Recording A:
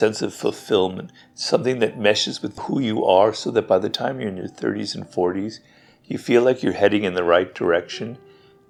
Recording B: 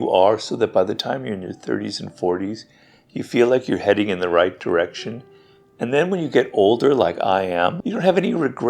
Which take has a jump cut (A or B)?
B